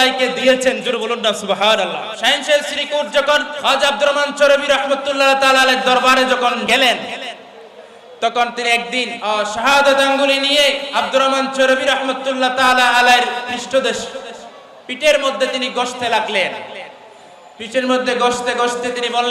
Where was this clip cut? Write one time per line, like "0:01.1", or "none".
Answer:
0:02.1
0:03.5
0:06.7
0:09.1
0:10.8